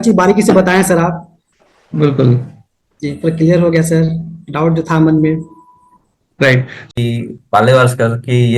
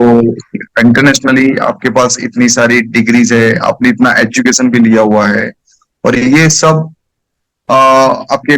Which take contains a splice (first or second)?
first